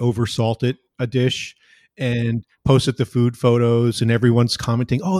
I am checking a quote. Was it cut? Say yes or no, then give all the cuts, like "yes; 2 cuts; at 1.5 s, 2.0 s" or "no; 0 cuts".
no; 0 cuts